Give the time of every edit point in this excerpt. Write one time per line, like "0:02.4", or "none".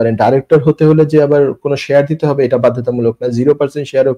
none